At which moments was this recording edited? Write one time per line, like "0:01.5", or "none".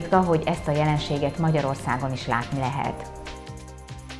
0:02.9